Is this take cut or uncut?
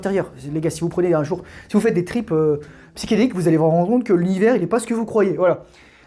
uncut